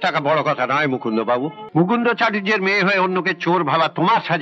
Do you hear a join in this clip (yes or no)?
yes